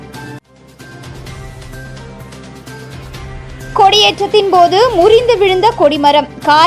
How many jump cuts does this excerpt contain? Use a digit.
0